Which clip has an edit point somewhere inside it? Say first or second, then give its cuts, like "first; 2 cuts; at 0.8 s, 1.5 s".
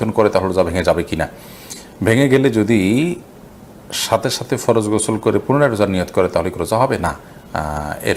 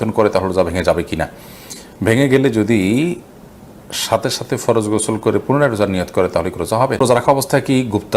second; 1 cut; at 7.0 s